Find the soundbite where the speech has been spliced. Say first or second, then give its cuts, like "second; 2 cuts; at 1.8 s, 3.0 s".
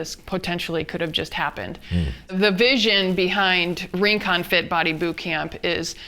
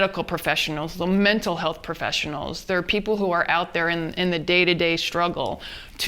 first; 1 cut; at 2.3 s